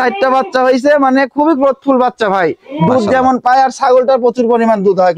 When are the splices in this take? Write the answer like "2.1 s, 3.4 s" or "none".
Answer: none